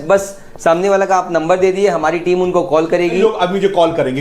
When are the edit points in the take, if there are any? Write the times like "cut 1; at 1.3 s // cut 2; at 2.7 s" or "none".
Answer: cut 1; at 3.2 s

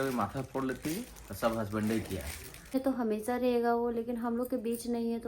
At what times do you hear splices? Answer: cut 1; at 2.7 s

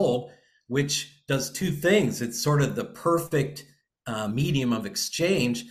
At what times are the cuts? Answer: cut 1; at 3.3 s

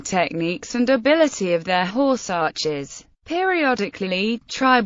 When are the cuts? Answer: cut 1; at 3.4 s

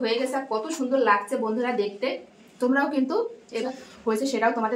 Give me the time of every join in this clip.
cut 1; at 3.6 s

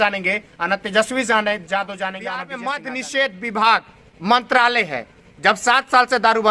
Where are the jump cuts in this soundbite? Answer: cut 1; at 2.4 s

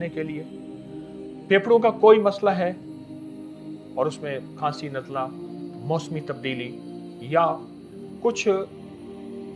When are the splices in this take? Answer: none

